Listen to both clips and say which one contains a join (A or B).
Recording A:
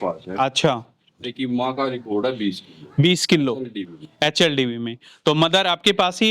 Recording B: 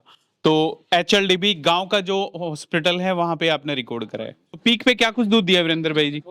B